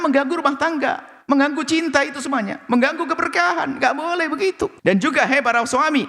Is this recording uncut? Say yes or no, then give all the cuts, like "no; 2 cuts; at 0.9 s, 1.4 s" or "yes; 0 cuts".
no; 1 cut; at 4.8 s